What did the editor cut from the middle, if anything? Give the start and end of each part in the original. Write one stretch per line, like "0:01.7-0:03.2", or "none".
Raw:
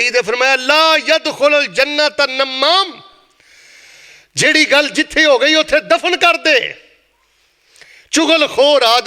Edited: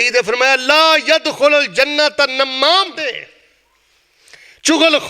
0:03.1-0:06.6